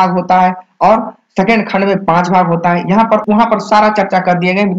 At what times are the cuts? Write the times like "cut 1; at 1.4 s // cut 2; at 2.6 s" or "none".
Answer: cut 1; at 3.2 s